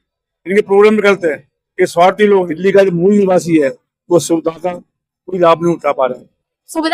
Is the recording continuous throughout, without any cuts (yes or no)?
no